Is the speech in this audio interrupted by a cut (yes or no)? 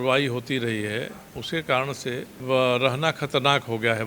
yes